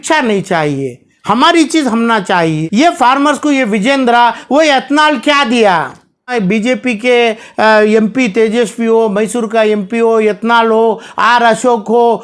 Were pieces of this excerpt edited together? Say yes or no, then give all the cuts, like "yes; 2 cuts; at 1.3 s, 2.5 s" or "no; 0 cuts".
yes; 2 cuts; at 2.6 s, 6.3 s